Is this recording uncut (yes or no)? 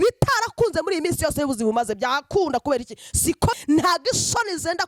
no